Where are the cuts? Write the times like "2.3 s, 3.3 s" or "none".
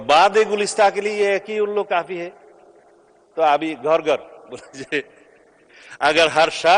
none